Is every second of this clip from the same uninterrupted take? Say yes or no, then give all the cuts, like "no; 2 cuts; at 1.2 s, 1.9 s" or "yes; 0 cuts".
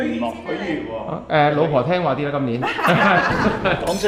yes; 0 cuts